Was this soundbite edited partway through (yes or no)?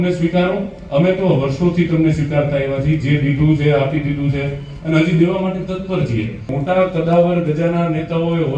yes